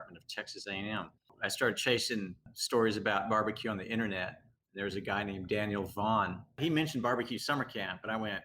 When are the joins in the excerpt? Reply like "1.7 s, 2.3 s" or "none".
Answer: 1.2 s, 6.6 s